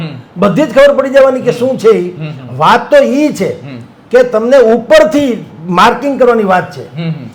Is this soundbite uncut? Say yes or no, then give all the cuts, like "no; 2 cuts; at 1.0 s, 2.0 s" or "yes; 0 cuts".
yes; 0 cuts